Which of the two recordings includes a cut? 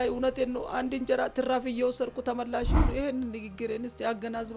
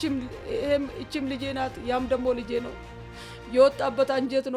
first; 1 cut; at 2.9 s

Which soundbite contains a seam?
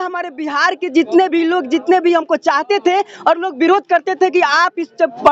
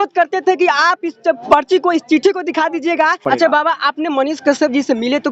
second; 1 cut; at 3.2 s

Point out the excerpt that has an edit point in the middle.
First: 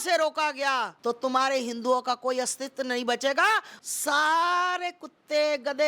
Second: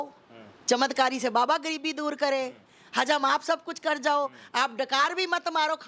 first; 2 cuts; at 0.9 s, 3.7 s

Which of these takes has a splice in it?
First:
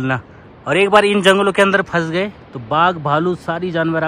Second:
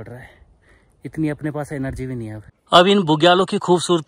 second; 1 cut; at 2.5 s

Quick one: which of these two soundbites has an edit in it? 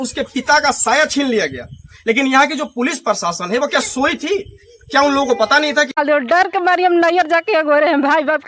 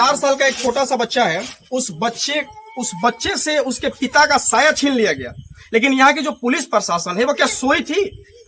first; 1 cut; at 6.0 s

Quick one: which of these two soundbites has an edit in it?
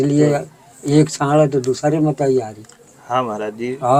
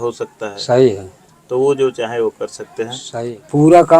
second; 1 cut; at 3.0 s

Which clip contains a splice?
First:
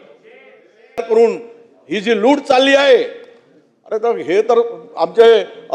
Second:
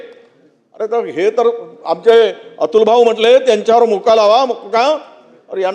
first; 1 cut; at 1.0 s

